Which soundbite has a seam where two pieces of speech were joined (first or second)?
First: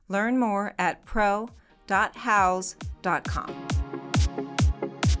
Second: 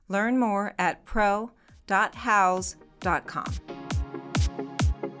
second